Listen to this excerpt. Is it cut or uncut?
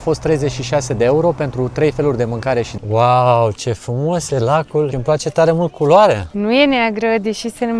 cut